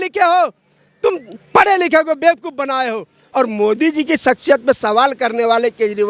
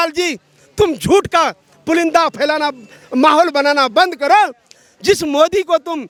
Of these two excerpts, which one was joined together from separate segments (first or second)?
first